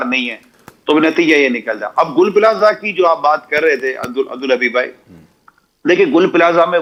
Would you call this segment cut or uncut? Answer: uncut